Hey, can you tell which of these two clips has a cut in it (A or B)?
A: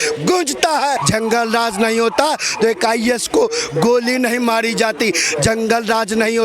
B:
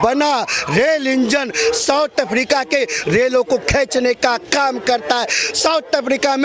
A